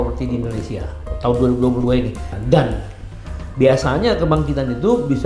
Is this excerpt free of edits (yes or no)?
no